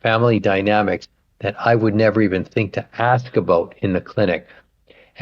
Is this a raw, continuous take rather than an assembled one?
yes; 0 cuts

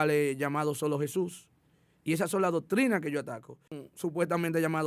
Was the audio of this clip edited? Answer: yes; 1 cut; at 3.8 s

